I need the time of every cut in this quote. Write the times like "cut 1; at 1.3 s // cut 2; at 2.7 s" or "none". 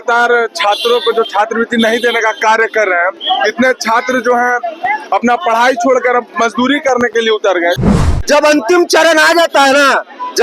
cut 1; at 8.0 s